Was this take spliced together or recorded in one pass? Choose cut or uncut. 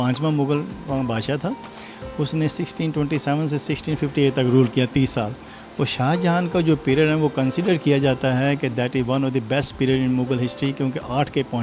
uncut